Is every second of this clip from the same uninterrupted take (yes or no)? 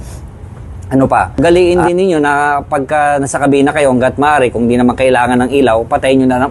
no